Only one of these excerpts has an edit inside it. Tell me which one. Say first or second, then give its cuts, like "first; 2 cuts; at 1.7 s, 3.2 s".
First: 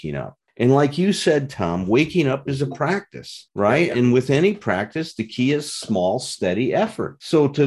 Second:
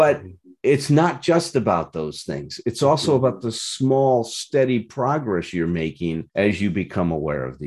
second; 1 cut; at 6.2 s